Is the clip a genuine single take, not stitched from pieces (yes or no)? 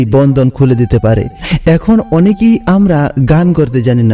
no